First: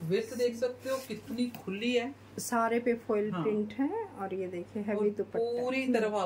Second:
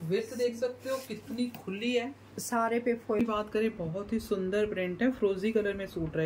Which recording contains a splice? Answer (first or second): second